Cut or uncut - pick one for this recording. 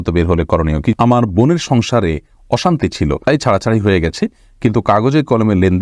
cut